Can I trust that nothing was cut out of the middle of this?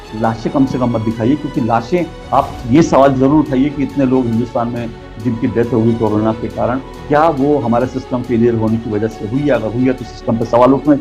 yes; 0 cuts

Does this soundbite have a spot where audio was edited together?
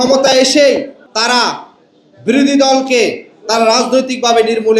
yes; 1 cut; at 1.0 s

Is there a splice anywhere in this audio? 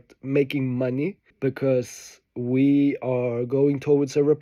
yes; 1 cut; at 1.2 s

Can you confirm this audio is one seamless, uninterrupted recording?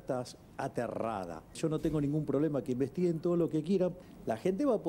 no; 2 cuts; at 1.6 s, 4.0 s

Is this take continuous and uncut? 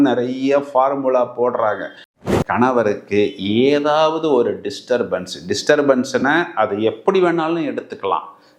no; 1 cut; at 2.2 s

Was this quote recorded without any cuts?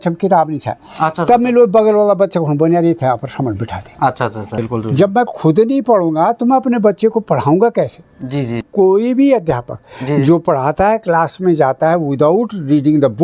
no; 2 cuts; at 4.5 s, 8.7 s

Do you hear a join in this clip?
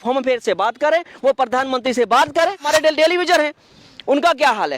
yes; 1 cut; at 2.6 s

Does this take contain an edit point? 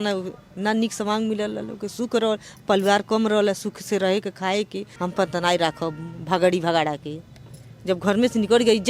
yes; 1 cut; at 4.8 s

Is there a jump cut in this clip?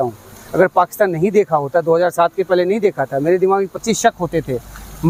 no; 0 cuts

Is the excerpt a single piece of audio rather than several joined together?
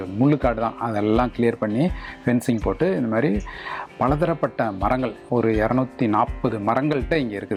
yes; 0 cuts

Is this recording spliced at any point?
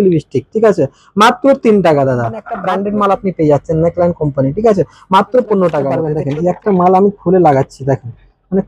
yes; 2 cuts; at 2.5 s, 6.1 s

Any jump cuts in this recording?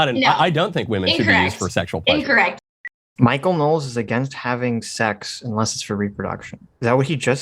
yes; 1 cut; at 2.7 s

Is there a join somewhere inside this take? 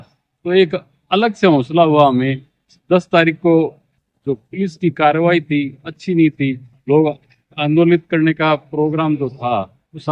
no; 0 cuts

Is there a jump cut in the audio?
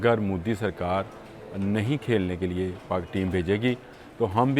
no; 0 cuts

